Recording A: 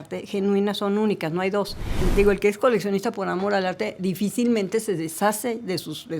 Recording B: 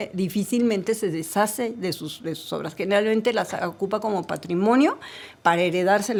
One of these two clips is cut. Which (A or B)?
A